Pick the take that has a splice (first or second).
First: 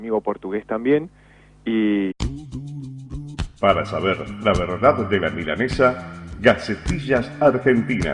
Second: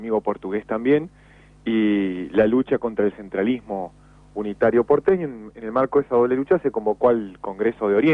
second